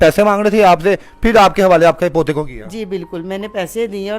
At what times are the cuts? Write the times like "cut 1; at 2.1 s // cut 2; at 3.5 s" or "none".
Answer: none